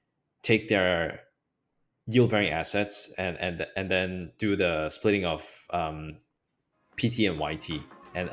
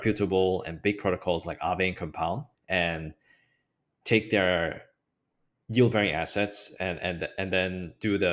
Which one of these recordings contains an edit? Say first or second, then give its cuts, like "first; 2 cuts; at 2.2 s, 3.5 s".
second; 1 cut; at 2.5 s